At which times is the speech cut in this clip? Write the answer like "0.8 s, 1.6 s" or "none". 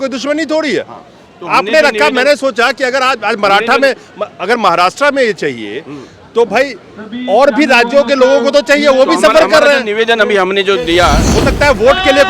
11.3 s

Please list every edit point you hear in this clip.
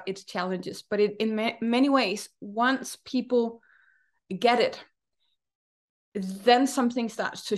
none

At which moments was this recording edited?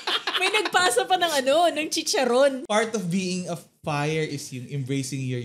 2.6 s

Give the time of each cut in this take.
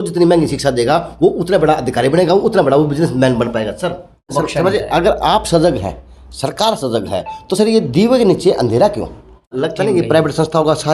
4.2 s, 9.5 s

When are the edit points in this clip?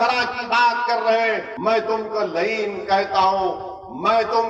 1.5 s

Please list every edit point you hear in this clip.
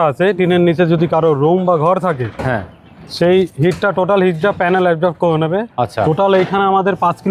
none

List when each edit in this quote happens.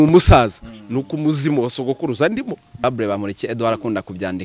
2.8 s

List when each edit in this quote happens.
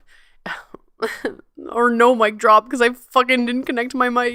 none

